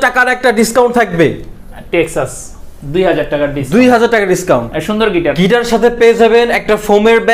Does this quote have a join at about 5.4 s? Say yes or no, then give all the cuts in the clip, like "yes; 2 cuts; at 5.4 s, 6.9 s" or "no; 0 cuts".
yes; 1 cut; at 5.4 s